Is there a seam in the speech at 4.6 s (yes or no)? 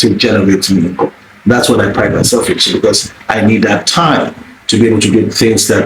no